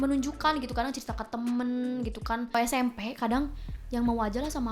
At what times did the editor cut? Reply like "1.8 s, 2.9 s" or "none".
2.5 s